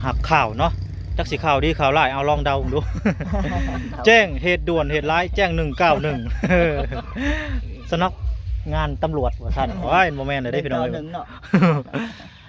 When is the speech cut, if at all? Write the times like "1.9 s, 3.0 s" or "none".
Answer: none

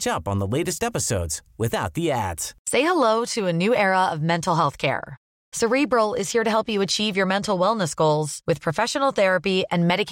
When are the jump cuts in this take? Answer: 2.5 s

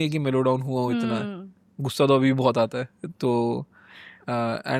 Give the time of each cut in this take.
none

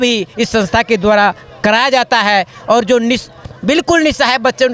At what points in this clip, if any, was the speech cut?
none

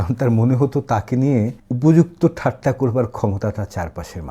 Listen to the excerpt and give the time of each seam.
1.6 s

